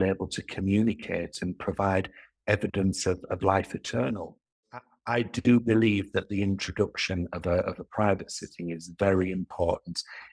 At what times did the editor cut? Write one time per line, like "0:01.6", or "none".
0:05.0